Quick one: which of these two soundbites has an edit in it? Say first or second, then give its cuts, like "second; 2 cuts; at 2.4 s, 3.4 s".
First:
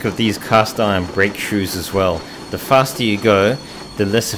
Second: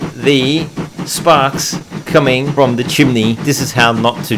second; 2 cuts; at 2.5 s, 3.4 s